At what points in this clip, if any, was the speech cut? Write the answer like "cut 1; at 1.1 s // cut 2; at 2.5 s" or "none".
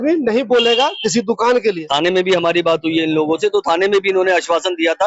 cut 1; at 1.6 s